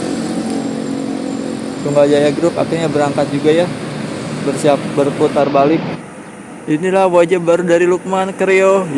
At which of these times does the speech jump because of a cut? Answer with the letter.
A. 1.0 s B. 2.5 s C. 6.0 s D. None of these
C